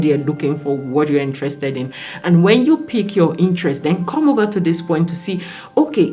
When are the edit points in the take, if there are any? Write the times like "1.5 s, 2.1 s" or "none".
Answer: none